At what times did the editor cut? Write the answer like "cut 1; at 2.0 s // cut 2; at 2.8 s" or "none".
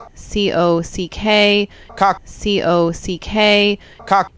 none